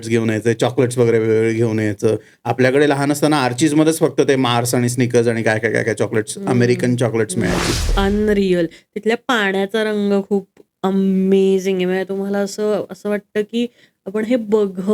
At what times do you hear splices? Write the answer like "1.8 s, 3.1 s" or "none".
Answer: 7.9 s